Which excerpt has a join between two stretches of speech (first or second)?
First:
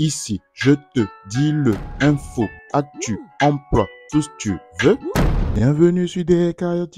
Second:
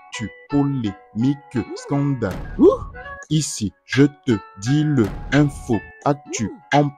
first